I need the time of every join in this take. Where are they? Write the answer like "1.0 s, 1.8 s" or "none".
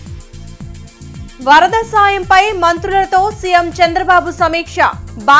0.9 s